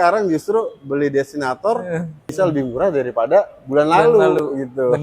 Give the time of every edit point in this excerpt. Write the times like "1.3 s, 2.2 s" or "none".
2.3 s